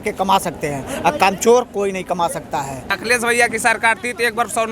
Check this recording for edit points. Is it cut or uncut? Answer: cut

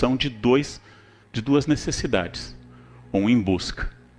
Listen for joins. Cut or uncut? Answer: uncut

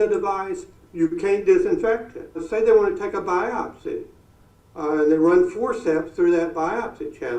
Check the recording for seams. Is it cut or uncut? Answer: cut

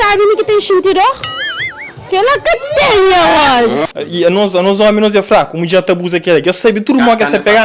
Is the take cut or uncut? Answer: cut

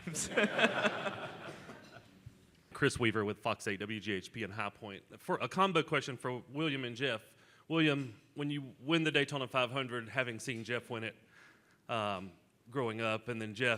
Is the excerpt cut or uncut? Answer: cut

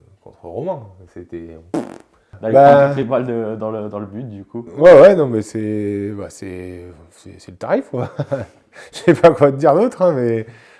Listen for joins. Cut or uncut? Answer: cut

